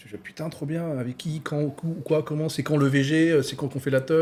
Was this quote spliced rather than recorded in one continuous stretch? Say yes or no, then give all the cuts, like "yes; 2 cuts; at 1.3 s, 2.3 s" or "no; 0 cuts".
no; 0 cuts